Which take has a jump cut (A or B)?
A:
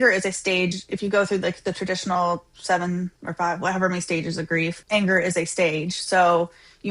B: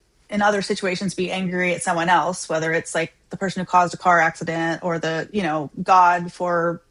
A